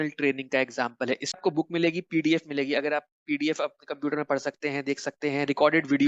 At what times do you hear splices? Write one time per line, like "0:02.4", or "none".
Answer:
0:01.4